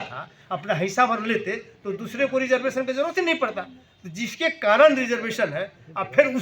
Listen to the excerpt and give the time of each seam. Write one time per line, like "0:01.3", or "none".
none